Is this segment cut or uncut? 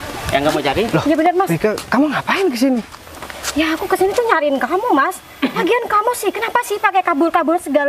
uncut